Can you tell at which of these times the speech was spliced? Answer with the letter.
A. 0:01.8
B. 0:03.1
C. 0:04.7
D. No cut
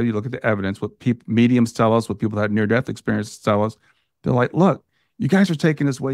D